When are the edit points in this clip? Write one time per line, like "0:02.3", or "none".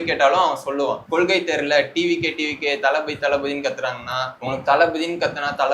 0:01.0
0:04.3